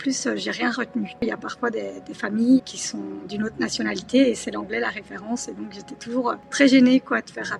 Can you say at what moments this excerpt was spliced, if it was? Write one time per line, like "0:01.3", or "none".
0:01.2
0:02.8
0:06.4